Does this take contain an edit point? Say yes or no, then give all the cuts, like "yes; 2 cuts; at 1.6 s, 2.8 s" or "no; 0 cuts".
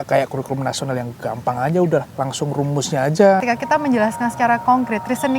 yes; 2 cuts; at 2.1 s, 3.4 s